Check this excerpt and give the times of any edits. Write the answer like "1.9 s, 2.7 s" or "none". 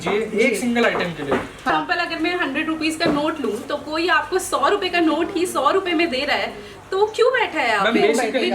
1.7 s

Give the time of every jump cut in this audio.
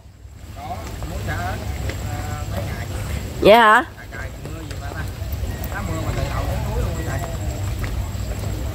none

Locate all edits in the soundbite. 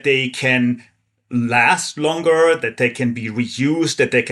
none

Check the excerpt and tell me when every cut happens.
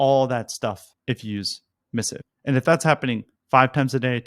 0.9 s, 2.0 s

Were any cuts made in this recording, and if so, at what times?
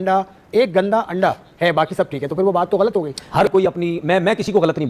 3.2 s

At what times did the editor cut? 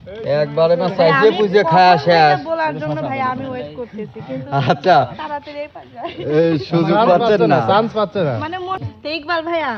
8.8 s

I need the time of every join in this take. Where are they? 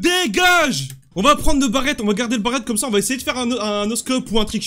0.9 s

